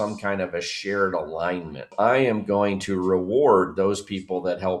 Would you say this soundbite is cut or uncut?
cut